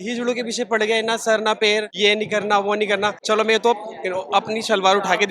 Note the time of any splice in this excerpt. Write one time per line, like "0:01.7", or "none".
0:01.9
0:03.2